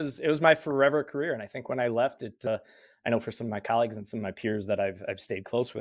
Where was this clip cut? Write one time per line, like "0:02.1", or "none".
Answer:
0:02.5